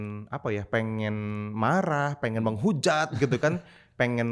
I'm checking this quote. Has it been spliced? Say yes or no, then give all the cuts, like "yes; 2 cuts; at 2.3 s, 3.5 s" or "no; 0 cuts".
no; 0 cuts